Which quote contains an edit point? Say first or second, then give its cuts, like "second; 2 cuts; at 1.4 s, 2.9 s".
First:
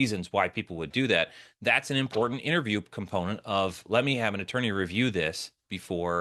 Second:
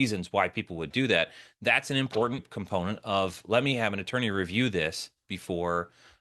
second; 1 cut; at 2.4 s